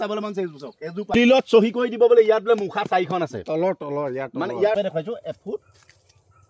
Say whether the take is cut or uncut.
cut